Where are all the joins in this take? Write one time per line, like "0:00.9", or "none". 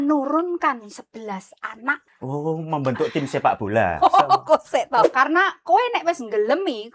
0:02.1
0:05.1